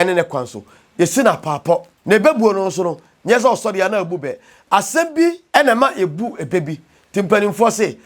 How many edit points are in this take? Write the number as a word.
two